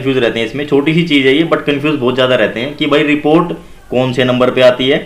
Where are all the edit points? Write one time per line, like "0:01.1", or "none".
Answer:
none